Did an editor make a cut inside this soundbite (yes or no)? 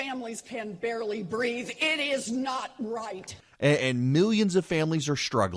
no